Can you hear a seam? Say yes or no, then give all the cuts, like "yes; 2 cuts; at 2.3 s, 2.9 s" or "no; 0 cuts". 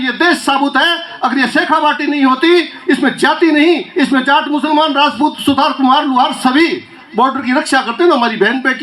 no; 0 cuts